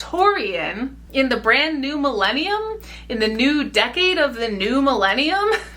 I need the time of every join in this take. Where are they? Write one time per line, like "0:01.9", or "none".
0:00.9